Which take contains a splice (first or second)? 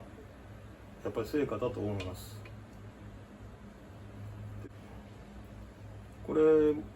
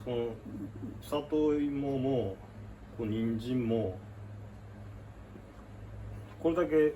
first